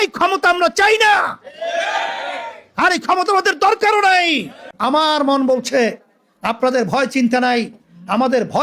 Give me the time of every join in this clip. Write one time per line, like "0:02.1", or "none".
0:04.5